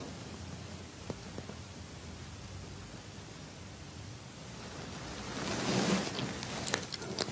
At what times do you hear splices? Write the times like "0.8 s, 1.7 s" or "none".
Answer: none